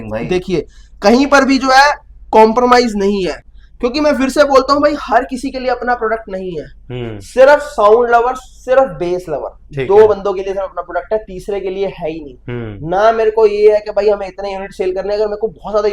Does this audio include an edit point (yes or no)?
no